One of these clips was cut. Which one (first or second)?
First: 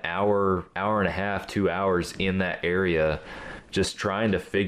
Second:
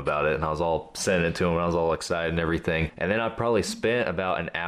second